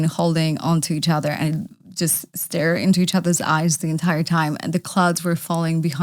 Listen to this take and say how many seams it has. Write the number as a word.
zero